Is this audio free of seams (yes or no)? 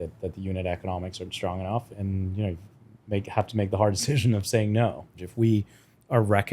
no